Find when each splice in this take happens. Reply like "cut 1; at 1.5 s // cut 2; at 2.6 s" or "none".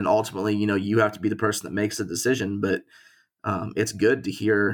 none